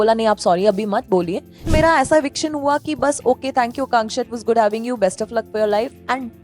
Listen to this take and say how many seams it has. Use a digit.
1